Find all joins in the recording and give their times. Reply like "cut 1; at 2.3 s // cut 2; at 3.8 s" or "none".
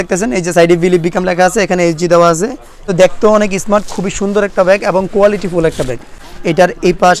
cut 1; at 2.9 s // cut 2; at 6.1 s